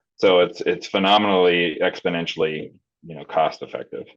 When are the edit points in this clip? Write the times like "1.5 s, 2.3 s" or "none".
none